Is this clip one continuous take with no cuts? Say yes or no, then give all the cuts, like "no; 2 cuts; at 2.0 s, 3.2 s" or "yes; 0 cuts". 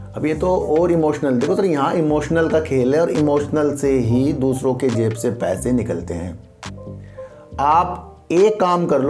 yes; 0 cuts